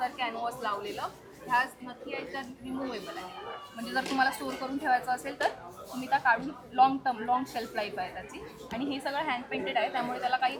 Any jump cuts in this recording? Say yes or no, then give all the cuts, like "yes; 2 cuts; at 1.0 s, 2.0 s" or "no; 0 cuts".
no; 0 cuts